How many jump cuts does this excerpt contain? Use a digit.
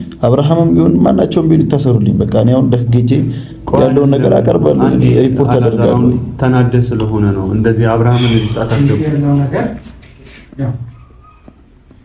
1